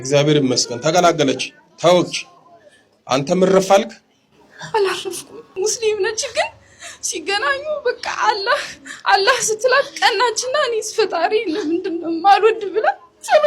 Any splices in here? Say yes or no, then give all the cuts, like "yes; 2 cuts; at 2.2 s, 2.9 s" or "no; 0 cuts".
yes; 1 cut; at 5.5 s